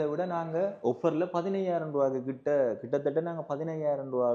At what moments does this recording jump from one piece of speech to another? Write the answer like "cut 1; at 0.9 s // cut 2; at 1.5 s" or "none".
none

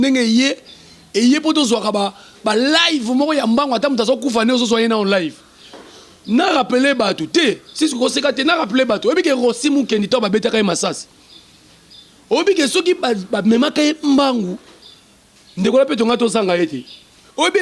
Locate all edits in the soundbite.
none

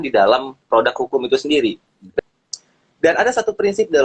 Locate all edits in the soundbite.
cut 1; at 2.2 s

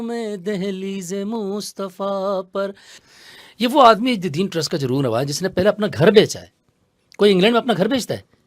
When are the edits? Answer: cut 1; at 2.9 s

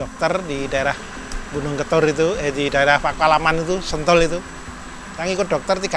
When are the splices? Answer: none

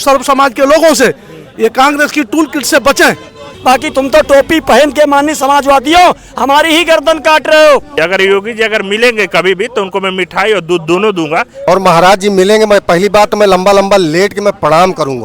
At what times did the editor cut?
cut 1; at 3.5 s // cut 2; at 7.9 s // cut 3; at 11.6 s

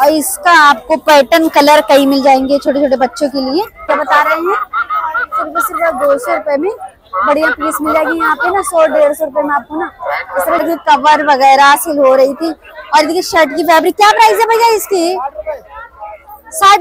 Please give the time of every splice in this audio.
cut 1; at 3.9 s // cut 2; at 10.6 s

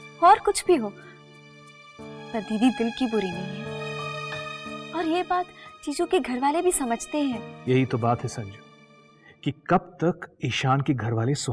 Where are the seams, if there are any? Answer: none

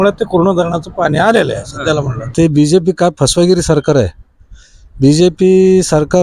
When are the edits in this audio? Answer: cut 1; at 2.3 s

